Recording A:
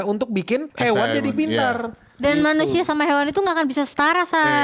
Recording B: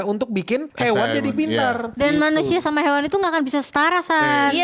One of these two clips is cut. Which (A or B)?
B